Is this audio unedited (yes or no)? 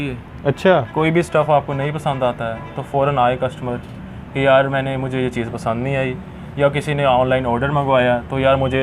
yes